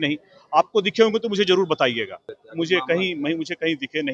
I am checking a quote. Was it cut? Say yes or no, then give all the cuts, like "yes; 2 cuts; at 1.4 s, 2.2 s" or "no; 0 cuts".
yes; 1 cut; at 2.4 s